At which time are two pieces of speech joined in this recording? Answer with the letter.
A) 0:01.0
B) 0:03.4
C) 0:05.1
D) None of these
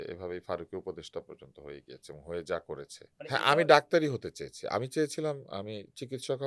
B